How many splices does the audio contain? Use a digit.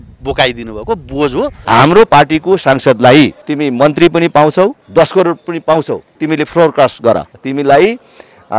5